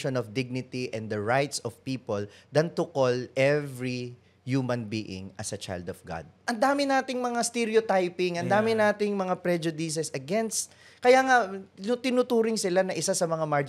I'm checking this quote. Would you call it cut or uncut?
cut